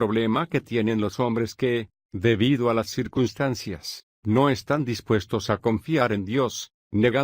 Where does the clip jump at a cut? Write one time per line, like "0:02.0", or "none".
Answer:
0:03.2